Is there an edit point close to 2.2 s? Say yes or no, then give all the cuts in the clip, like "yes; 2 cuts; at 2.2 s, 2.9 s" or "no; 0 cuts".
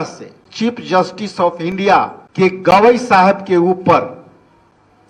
yes; 1 cut; at 2.2 s